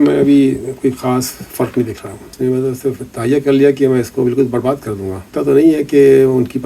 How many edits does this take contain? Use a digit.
2